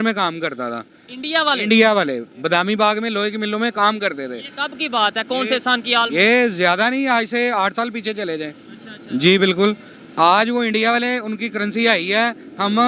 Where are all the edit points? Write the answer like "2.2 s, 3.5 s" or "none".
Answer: none